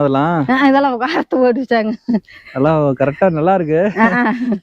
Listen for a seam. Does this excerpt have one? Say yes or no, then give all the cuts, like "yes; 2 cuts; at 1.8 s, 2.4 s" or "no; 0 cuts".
no; 0 cuts